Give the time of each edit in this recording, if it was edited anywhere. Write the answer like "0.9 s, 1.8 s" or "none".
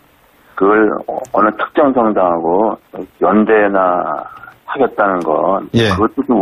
4.7 s